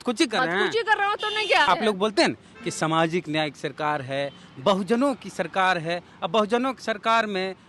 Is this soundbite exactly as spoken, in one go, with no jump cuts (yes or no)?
no